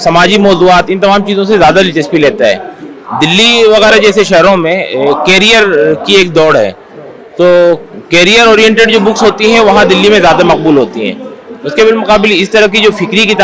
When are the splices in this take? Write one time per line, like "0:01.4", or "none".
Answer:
none